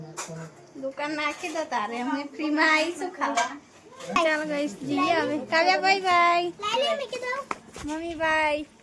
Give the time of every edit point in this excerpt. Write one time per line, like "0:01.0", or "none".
0:04.2